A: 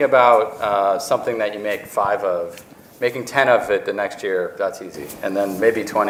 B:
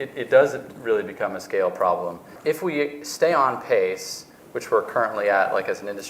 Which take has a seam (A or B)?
B